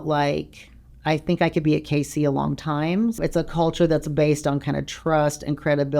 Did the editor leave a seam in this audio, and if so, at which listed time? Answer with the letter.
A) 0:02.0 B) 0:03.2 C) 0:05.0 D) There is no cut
B